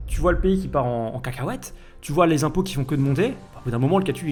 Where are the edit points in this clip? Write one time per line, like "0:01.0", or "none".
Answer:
none